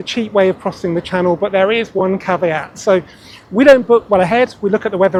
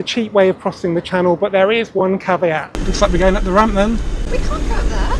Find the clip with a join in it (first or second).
second